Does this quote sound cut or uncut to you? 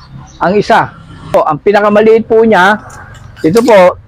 cut